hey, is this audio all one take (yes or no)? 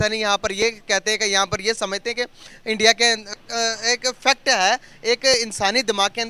no